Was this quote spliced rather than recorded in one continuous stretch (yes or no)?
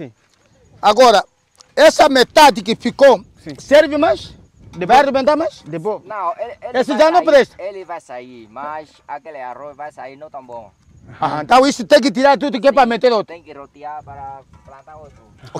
no